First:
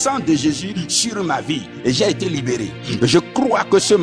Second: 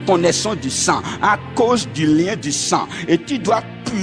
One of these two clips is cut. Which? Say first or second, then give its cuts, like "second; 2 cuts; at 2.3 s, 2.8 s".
first; 2 cuts; at 1.7 s, 2.8 s